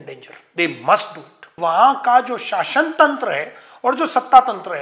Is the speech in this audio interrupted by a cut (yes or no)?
yes